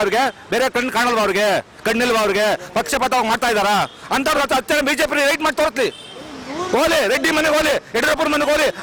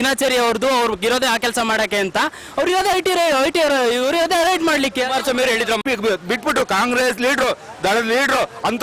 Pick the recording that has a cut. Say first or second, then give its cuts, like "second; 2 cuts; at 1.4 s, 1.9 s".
second; 1 cut; at 5.8 s